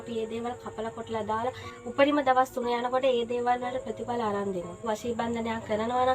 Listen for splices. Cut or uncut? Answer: cut